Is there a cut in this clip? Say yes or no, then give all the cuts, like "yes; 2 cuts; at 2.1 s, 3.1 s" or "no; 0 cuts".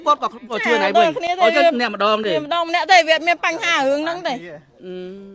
no; 0 cuts